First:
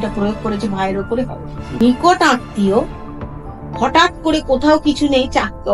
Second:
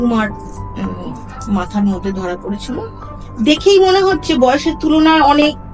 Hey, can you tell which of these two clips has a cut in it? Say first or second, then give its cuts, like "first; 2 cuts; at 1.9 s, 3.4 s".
first; 1 cut; at 1.8 s